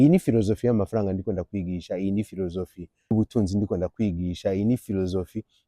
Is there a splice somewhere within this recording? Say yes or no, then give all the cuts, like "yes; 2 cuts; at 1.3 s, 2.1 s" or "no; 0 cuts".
yes; 1 cut; at 3.1 s